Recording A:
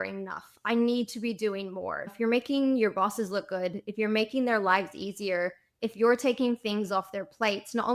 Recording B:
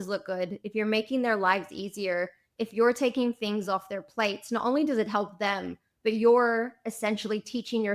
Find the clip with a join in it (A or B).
A